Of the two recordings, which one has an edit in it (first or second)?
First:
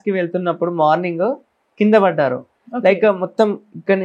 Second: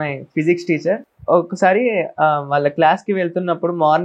second